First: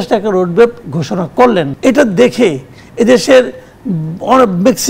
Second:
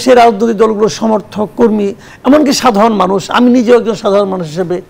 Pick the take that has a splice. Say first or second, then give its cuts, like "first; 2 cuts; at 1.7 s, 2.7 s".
first; 1 cut; at 1.7 s